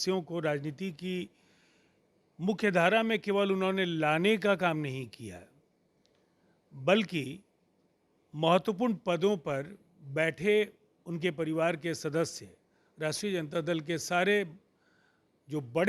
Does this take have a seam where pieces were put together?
no; 0 cuts

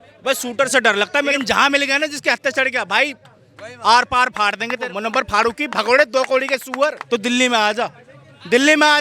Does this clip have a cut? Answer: yes; 3 cuts; at 1.3 s, 4.9 s, 7.0 s

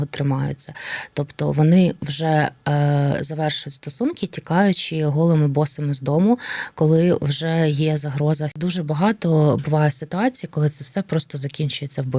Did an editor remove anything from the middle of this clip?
yes; 1 cut; at 8.5 s

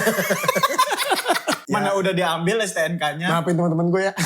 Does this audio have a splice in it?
yes; 1 cut; at 1.6 s

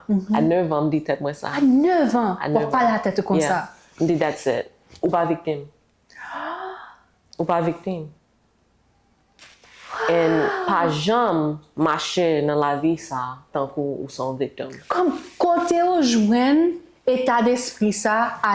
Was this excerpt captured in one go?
yes; 0 cuts

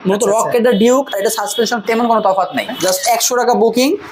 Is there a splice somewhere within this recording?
yes; 1 cut; at 2.7 s

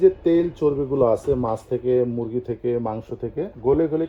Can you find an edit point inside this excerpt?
no; 0 cuts

